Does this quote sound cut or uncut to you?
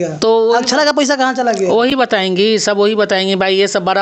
uncut